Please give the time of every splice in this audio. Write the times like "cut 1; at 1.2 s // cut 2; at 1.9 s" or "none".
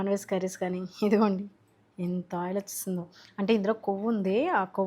none